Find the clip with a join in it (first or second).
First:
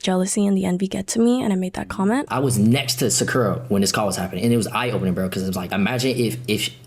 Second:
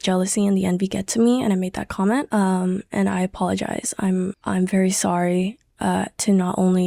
first